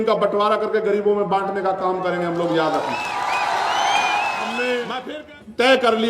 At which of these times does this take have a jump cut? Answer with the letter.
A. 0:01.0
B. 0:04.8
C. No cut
B